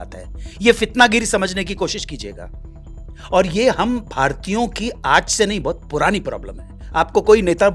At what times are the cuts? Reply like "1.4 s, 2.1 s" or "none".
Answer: none

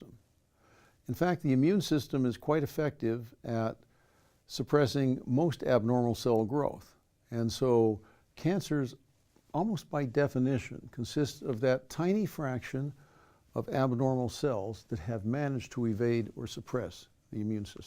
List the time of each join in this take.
5.8 s

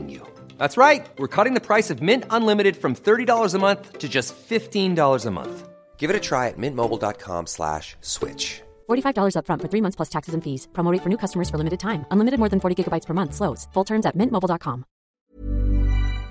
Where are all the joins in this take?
15.1 s

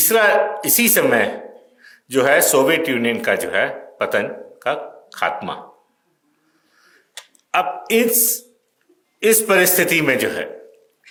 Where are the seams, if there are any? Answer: none

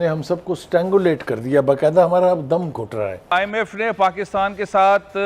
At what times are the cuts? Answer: 3.3 s

